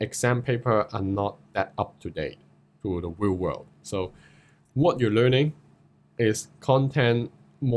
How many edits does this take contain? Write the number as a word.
zero